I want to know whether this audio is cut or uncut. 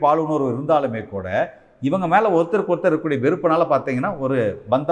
uncut